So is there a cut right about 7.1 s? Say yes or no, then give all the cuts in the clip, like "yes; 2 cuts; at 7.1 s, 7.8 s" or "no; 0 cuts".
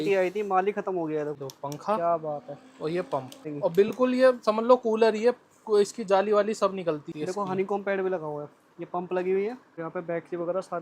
yes; 4 cuts; at 1.4 s, 3.5 s, 7.1 s, 9.8 s